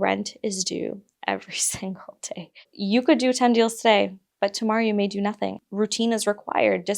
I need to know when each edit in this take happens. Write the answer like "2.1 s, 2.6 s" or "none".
2.7 s, 5.6 s